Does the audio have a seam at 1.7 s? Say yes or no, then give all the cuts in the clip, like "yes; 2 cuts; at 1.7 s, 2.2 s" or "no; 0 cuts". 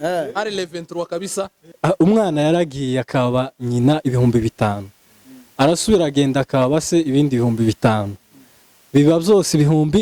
yes; 1 cut; at 1.7 s